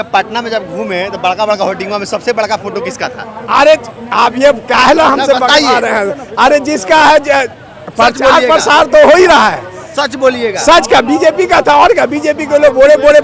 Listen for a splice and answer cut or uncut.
uncut